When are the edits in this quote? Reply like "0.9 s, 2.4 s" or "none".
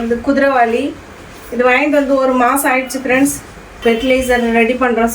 3.7 s